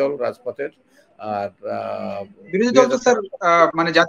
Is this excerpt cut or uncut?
uncut